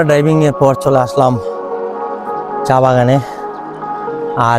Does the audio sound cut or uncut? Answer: cut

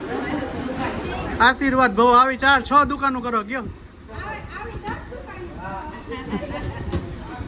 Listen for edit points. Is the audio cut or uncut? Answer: uncut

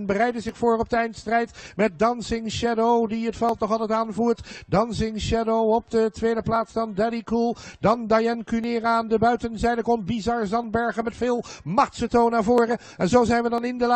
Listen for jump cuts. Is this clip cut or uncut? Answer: uncut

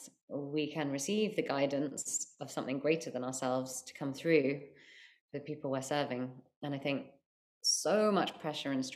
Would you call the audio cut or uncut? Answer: uncut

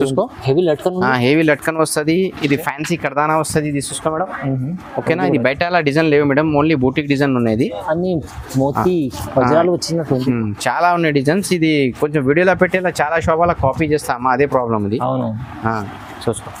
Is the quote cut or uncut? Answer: uncut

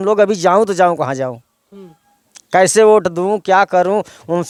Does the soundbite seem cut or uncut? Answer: uncut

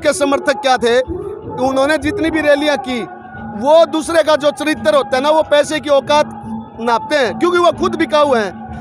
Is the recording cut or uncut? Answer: uncut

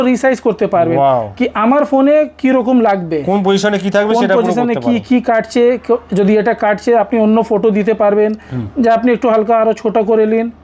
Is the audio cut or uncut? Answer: uncut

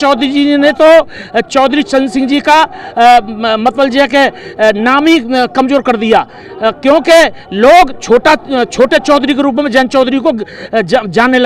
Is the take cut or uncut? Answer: uncut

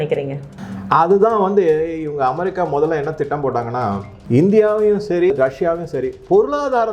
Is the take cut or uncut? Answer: cut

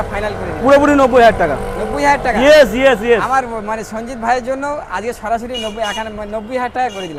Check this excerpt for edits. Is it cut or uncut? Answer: uncut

